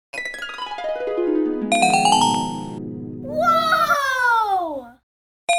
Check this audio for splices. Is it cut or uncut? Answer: uncut